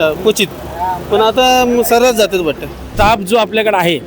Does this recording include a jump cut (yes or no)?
yes